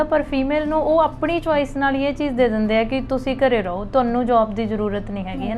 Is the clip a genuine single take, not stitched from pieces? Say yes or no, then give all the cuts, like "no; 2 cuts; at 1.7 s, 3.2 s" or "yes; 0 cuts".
yes; 0 cuts